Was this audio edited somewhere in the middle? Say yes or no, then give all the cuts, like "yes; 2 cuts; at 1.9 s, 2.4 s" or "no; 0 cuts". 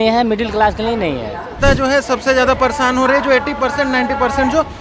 yes; 1 cut; at 1.6 s